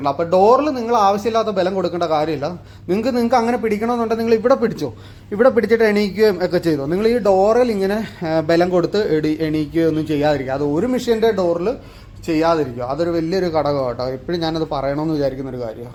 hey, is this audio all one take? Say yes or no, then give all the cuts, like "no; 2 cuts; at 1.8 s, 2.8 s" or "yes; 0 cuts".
yes; 0 cuts